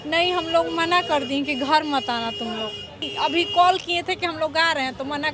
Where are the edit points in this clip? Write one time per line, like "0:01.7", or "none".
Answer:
0:03.1